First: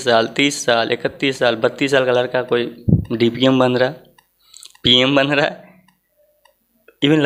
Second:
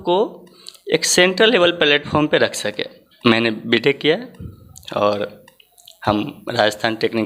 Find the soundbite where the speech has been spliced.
second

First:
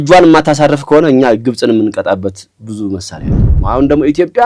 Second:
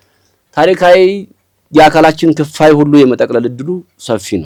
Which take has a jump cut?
first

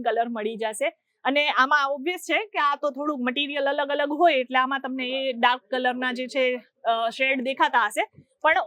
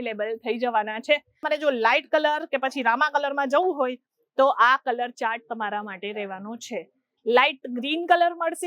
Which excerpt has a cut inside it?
second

